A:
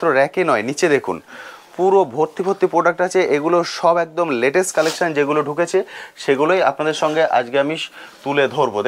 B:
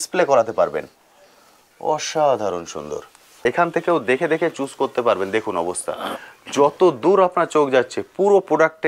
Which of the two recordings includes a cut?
B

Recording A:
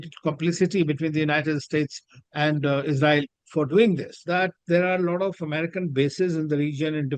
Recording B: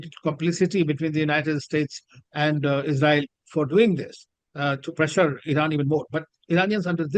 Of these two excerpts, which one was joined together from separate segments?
A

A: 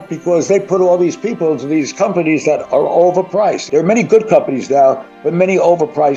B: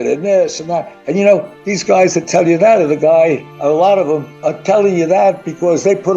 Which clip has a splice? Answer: B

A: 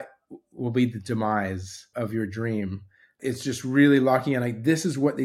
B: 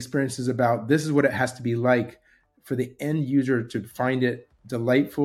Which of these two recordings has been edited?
A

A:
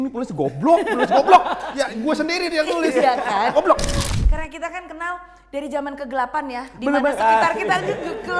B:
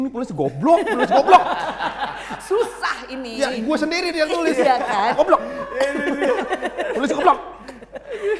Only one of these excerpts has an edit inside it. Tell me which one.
A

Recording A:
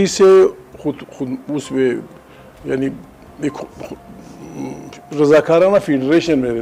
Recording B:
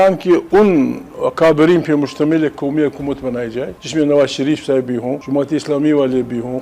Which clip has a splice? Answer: B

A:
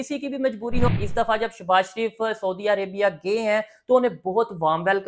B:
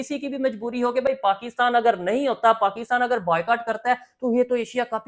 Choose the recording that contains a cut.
A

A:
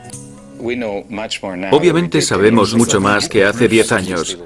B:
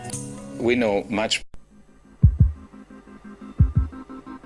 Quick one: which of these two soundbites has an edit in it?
A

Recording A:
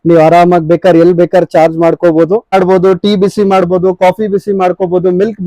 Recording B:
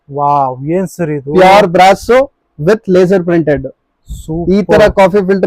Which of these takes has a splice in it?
A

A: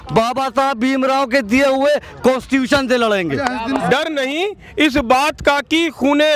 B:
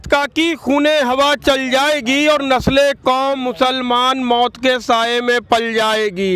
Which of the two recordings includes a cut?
A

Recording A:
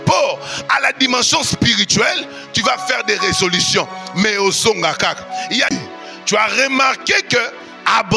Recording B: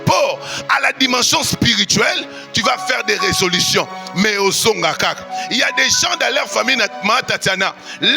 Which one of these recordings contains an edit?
A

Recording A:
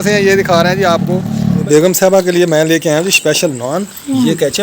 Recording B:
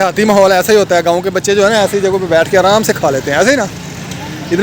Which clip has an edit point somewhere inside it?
A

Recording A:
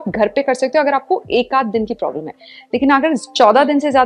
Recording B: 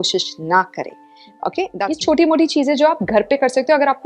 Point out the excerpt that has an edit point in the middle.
B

